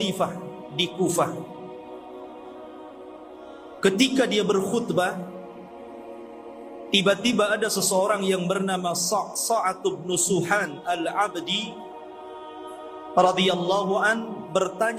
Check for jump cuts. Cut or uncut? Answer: uncut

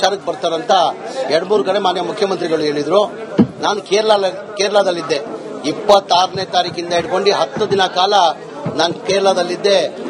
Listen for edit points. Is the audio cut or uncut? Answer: cut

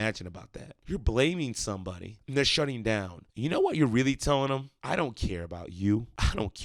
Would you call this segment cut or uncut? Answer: uncut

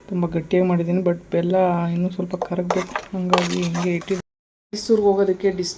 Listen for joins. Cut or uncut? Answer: cut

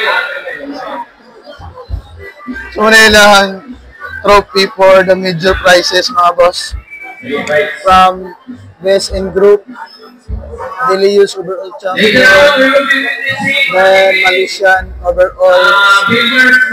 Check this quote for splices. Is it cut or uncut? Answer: uncut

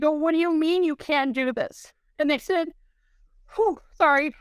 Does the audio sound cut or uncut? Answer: uncut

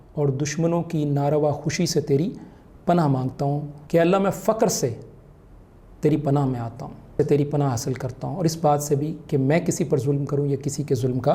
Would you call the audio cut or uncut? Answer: cut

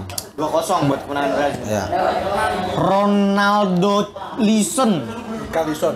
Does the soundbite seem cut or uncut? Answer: cut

